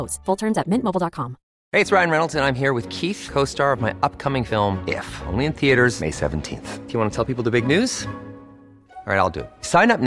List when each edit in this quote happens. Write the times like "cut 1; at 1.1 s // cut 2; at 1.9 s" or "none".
cut 1; at 1.5 s